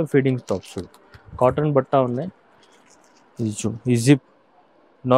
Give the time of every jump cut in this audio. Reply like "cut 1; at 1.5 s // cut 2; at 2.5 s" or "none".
none